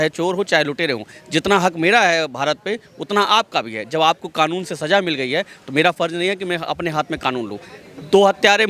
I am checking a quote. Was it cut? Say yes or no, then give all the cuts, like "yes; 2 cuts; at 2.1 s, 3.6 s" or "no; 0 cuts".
no; 0 cuts